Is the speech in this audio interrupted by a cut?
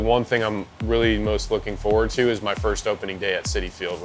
no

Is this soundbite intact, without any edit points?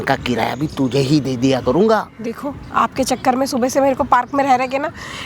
yes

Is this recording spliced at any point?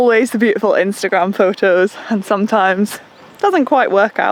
no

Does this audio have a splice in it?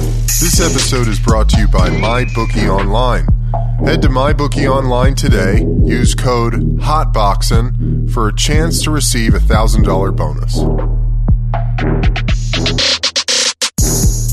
no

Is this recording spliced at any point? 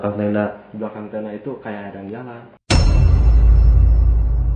yes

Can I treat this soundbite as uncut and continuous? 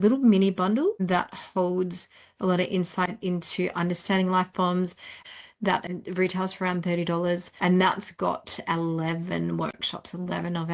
no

